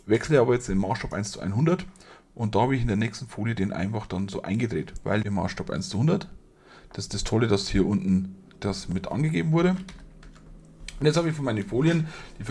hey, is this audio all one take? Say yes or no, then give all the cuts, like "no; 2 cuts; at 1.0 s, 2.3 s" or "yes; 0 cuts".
no; 1 cut; at 5.0 s